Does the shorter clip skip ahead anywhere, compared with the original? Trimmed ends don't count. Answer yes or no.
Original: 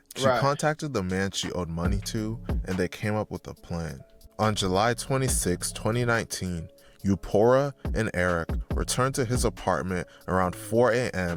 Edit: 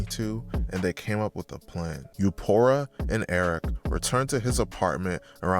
yes